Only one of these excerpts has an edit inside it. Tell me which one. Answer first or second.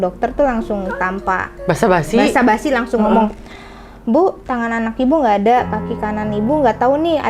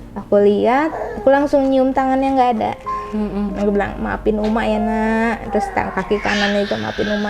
first